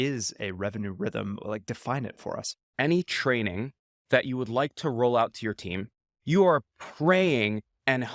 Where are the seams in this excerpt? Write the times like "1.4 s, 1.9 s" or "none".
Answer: 2.7 s, 6.1 s